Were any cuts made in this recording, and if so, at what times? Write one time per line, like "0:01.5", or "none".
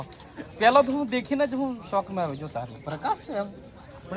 none